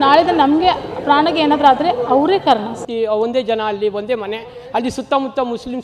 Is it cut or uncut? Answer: cut